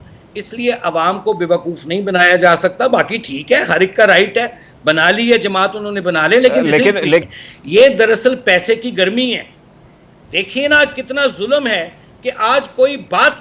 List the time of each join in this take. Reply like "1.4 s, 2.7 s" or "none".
7.2 s